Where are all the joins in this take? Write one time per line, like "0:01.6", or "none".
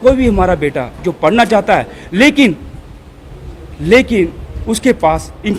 none